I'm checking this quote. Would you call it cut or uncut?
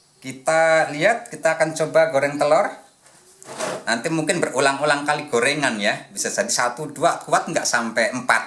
uncut